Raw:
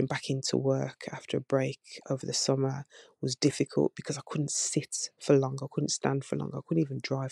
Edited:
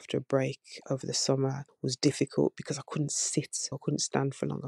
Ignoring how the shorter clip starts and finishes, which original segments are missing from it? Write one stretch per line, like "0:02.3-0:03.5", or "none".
0:02.9-0:03.1
0:05.1-0:05.6